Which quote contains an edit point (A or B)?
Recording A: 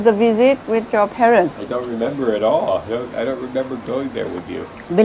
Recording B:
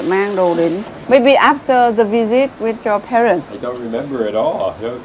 B